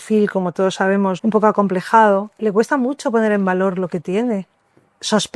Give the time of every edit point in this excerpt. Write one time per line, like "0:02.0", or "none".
0:01.2
0:02.4